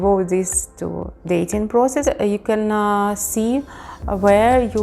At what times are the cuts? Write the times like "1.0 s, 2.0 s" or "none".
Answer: 2.0 s